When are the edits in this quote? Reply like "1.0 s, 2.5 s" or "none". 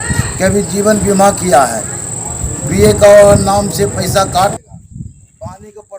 4.6 s